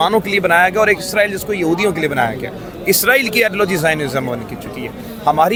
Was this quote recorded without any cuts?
yes; 0 cuts

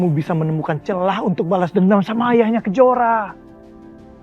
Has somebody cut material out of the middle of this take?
yes; 1 cut; at 3.3 s

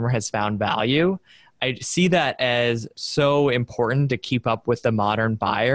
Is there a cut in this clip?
no; 0 cuts

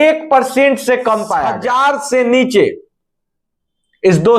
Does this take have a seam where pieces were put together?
yes; 1 cut; at 1.6 s

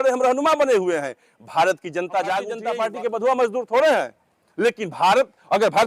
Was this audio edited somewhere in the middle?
yes; 1 cut; at 2.6 s

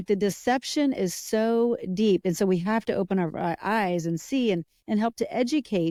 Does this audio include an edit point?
no; 0 cuts

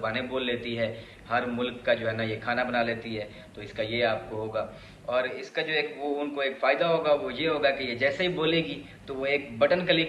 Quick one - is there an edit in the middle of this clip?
no; 0 cuts

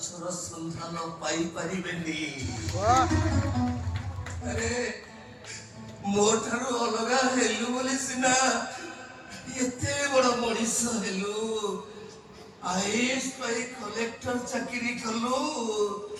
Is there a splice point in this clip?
no; 0 cuts

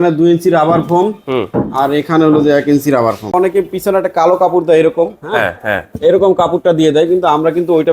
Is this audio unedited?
no; 1 cut; at 3.3 s

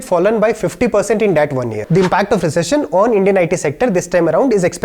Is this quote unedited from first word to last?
no; 1 cut; at 1.8 s

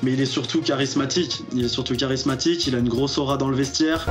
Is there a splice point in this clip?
no; 0 cuts

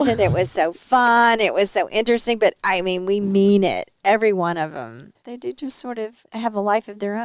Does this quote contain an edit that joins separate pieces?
no; 0 cuts

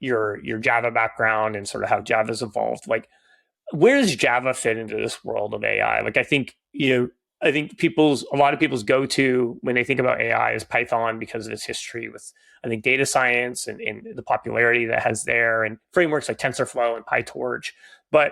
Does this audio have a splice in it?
no; 0 cuts

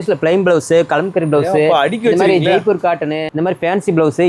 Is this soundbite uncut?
yes; 0 cuts

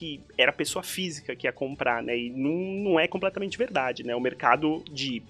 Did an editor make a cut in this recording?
no; 0 cuts

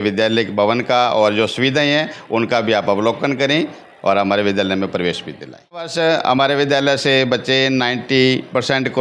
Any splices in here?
yes; 1 cut; at 5.9 s

